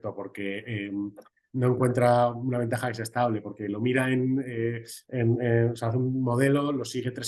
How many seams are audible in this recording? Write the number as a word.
zero